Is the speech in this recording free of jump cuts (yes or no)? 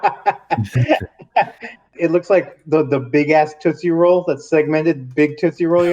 no